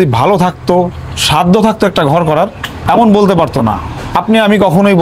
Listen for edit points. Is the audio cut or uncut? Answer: cut